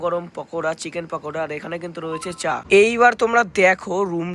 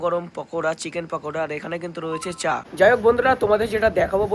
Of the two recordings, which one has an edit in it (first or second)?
first